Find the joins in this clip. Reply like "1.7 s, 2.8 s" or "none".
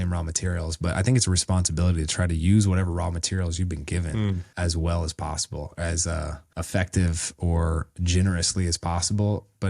4.5 s, 6.5 s